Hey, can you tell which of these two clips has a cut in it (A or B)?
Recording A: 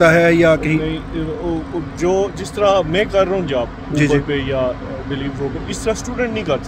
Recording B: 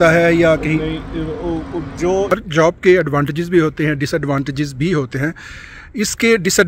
B